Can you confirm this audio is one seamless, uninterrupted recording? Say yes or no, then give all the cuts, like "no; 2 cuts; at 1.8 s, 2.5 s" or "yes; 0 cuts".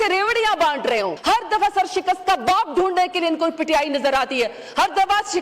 no; 1 cut; at 1.2 s